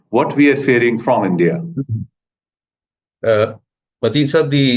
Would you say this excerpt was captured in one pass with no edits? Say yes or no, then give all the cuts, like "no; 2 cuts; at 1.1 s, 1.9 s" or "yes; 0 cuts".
yes; 0 cuts